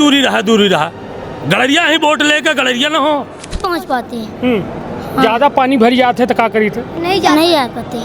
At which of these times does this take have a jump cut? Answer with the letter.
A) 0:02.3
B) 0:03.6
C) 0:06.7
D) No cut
B